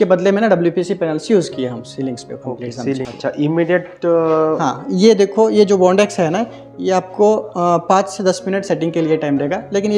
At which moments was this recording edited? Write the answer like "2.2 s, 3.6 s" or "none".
3.1 s

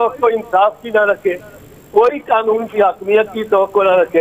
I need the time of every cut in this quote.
none

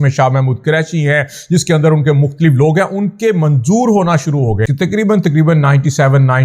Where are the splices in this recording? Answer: 4.7 s

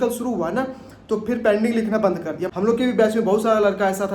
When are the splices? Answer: 2.5 s

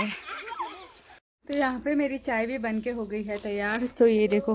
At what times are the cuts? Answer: 1.5 s

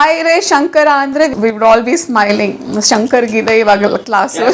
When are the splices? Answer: 1.3 s

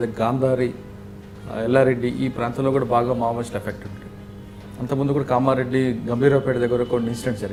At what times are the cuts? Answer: none

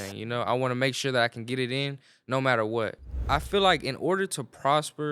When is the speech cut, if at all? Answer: 3.0 s

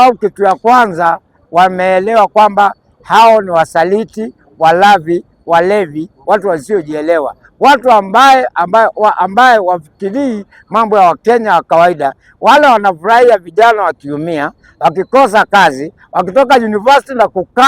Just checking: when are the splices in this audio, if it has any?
none

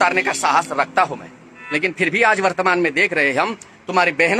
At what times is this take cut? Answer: none

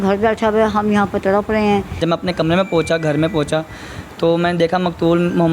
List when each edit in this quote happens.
2.0 s

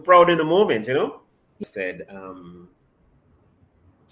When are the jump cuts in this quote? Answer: 1.6 s

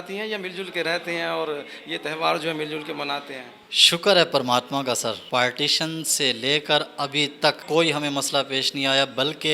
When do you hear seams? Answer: 5.2 s, 7.6 s

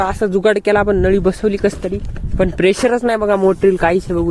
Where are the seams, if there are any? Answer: none

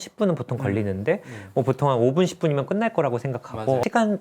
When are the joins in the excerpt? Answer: none

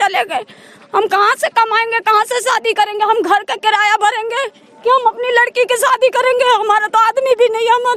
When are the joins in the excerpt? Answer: none

